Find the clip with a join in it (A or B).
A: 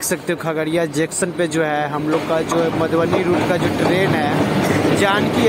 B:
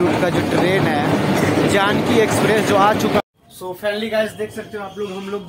B